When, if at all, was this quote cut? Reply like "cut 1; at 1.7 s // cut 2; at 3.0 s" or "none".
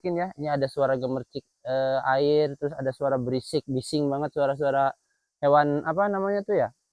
none

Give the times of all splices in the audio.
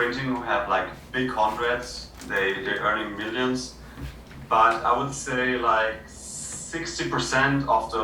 none

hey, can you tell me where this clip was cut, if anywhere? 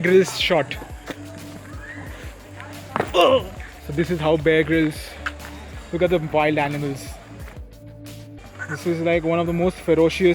cut 1; at 8.4 s

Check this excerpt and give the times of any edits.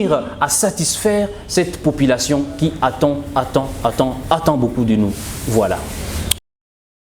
none

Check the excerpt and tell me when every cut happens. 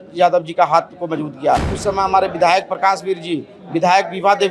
cut 1; at 1.7 s

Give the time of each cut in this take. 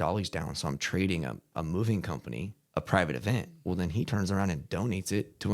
cut 1; at 2.6 s

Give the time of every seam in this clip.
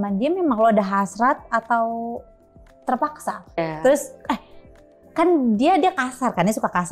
cut 1; at 3.6 s

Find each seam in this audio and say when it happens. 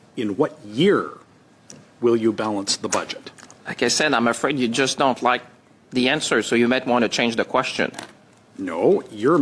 none

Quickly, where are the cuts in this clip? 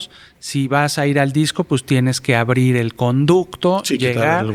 none

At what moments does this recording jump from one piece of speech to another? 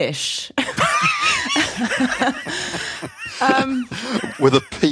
cut 1; at 4.0 s

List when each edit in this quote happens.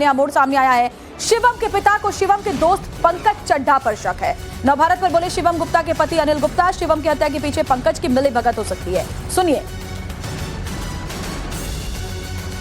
cut 1; at 9.2 s

